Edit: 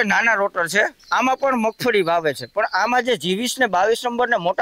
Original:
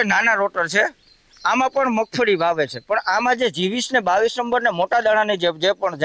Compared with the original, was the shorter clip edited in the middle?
yes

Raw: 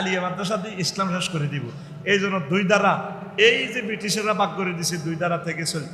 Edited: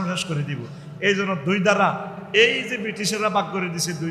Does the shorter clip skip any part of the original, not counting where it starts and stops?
no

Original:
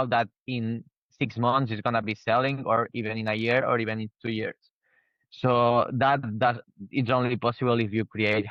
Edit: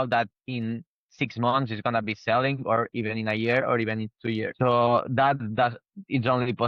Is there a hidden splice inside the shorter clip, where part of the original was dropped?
yes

